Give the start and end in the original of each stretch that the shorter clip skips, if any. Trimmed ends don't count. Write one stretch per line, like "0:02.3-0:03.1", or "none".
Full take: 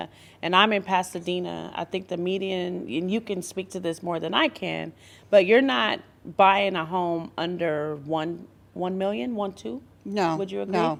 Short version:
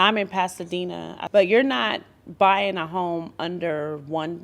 0:01.7-0:05.1